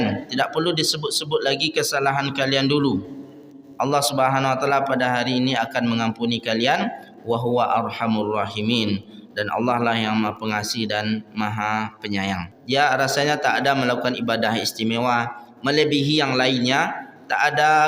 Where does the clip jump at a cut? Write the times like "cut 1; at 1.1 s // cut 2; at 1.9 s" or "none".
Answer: cut 1; at 12.5 s